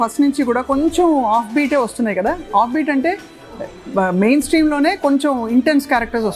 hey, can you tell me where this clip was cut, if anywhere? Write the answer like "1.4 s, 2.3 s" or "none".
none